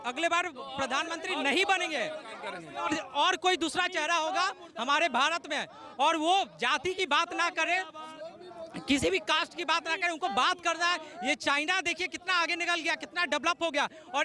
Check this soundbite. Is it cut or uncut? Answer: uncut